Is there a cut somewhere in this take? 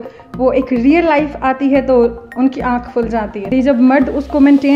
yes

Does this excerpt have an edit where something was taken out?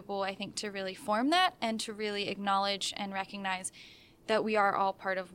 no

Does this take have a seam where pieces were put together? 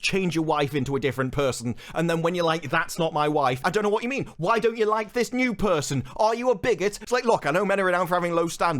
yes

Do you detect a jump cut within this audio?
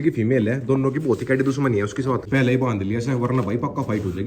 no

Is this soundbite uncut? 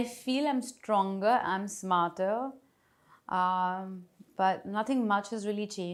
yes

